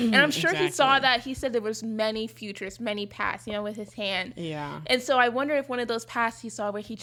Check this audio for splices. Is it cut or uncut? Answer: uncut